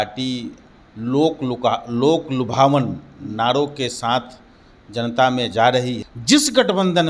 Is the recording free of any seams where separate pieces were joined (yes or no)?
no